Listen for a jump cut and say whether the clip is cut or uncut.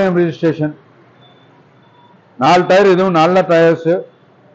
uncut